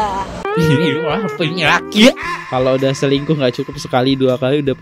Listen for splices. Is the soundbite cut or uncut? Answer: uncut